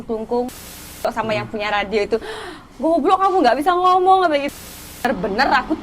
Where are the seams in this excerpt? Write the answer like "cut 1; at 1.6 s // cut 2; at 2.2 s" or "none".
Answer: cut 1; at 1.0 s // cut 2; at 5.0 s